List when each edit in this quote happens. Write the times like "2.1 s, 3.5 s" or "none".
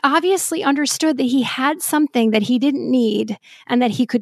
none